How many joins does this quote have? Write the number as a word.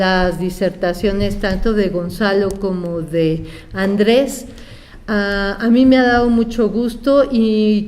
one